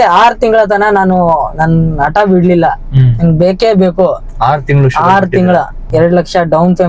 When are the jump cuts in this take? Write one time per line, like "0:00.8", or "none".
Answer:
0:05.8